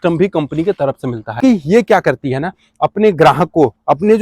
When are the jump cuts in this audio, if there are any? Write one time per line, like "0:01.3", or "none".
0:01.4